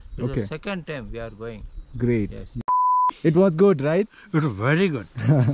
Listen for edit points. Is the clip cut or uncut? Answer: cut